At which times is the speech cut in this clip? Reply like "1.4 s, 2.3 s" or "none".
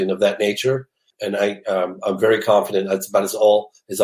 1.1 s